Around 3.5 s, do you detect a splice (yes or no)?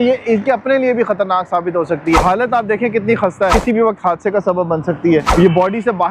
yes